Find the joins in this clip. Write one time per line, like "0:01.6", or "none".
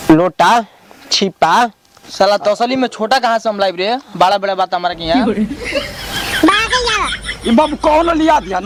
none